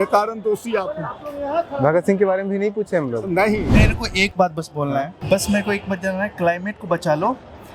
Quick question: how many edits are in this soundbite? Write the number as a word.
two